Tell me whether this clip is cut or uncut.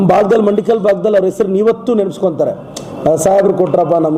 uncut